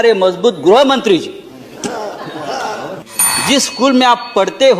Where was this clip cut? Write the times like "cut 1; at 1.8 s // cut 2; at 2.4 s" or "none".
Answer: cut 1; at 3.1 s